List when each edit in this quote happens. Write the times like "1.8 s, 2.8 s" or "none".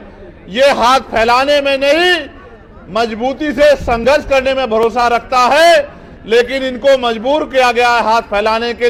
none